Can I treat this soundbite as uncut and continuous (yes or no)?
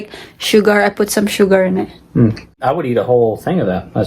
no